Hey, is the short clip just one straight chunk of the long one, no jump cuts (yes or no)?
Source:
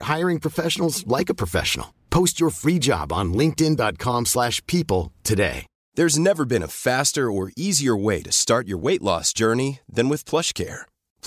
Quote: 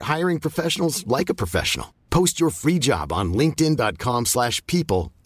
yes